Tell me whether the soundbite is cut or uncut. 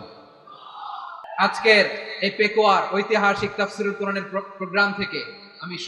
cut